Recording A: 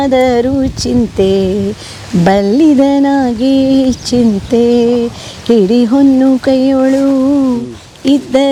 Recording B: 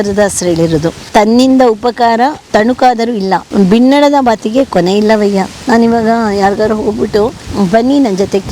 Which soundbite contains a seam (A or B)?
B